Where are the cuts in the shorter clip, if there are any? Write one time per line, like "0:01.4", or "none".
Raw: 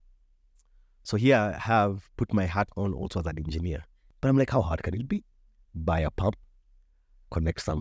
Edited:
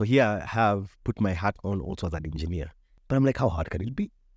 none